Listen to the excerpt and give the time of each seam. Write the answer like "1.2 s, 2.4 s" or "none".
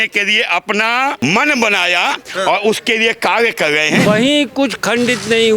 1.2 s, 4.1 s